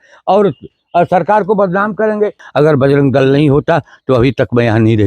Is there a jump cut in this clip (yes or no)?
yes